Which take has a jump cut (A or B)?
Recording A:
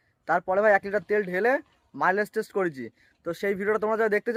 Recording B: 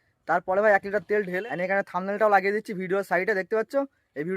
B